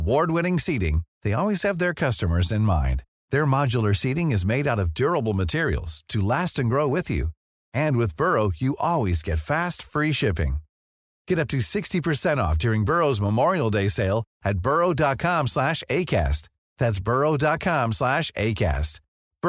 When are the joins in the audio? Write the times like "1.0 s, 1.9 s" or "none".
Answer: none